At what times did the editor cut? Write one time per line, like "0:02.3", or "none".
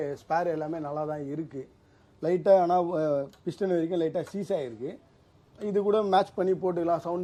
none